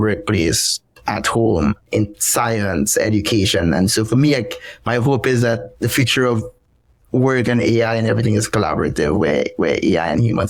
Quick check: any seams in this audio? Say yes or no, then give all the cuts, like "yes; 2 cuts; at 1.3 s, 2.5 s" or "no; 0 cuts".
no; 0 cuts